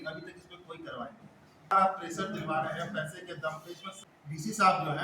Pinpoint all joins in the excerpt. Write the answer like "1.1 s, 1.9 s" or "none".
1.7 s, 4.0 s